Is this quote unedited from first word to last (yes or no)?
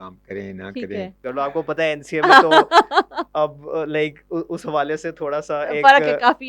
no